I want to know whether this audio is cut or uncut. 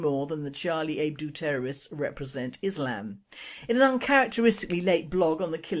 uncut